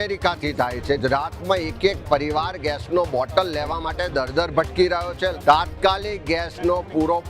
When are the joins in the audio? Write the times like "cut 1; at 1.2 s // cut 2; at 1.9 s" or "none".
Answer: cut 1; at 1.0 s // cut 2; at 5.4 s

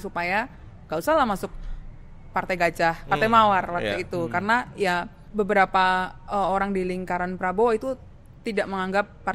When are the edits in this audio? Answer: none

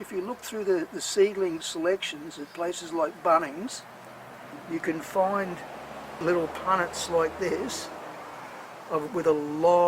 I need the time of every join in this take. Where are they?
cut 1; at 6.2 s

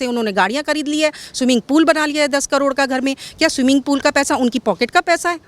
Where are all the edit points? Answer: none

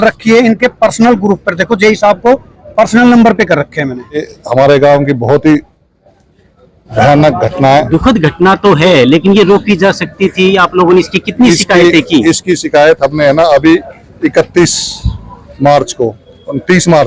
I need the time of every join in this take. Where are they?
cut 1; at 4.4 s

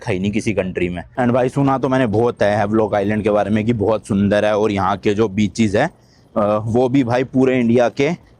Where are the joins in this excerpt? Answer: cut 1; at 1.1 s

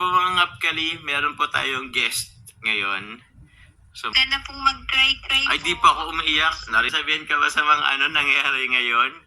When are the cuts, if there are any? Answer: cut 1; at 4.1 s // cut 2; at 6.9 s

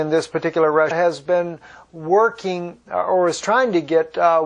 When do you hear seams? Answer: none

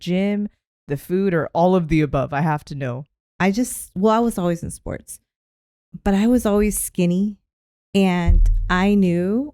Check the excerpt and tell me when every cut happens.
cut 1; at 3.1 s

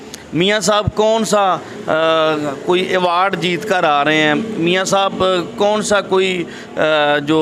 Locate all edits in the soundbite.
none

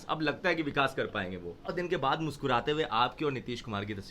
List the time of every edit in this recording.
cut 1; at 1.6 s

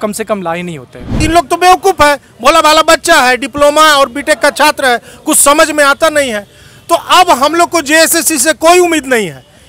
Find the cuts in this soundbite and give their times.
cut 1; at 1.2 s

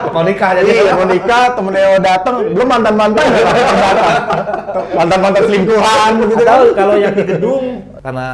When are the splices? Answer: none

